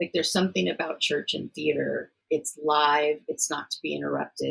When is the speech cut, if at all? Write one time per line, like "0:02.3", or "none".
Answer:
0:02.2